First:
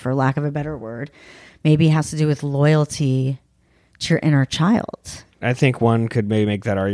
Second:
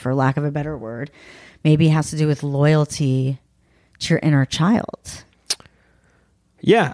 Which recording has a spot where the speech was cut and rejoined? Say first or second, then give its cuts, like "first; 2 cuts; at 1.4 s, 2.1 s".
first; 1 cut; at 5.4 s